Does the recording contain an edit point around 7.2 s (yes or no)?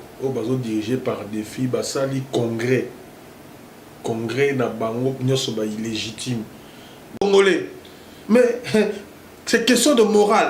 yes